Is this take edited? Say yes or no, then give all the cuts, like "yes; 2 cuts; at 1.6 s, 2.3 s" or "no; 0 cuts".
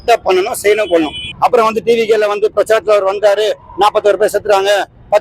yes; 1 cut; at 1.2 s